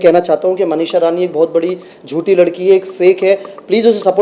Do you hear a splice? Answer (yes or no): no